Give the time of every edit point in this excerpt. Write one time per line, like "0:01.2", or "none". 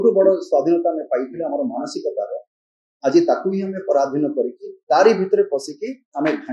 none